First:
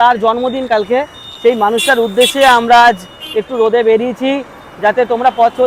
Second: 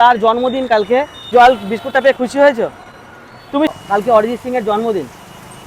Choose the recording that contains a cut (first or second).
second